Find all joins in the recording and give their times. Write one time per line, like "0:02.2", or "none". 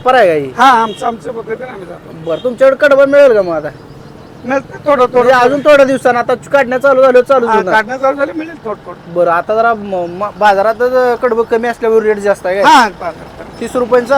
none